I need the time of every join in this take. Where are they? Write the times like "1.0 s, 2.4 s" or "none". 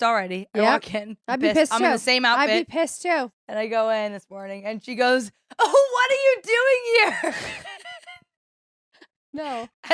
3.3 s